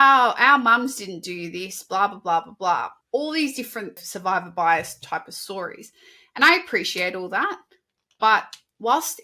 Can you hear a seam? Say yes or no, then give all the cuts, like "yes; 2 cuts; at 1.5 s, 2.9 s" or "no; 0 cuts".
yes; 2 cuts; at 3.0 s, 4.0 s